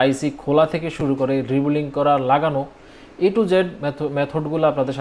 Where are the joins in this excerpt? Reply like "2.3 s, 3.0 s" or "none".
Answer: none

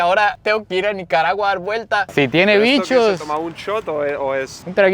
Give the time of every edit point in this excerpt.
2.1 s

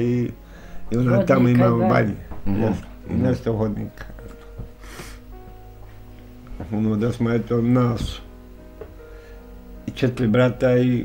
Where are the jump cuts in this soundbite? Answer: none

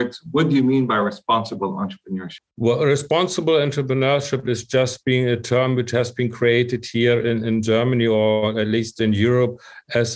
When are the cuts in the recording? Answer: 2.4 s

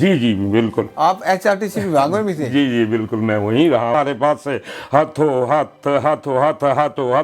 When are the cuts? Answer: 3.9 s

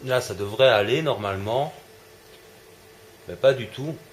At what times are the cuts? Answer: none

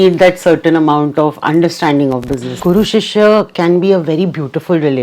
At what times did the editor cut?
2.5 s

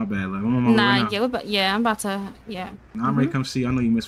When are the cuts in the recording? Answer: none

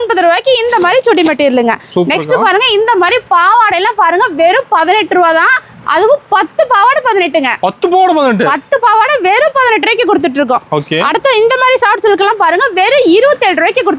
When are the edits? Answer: none

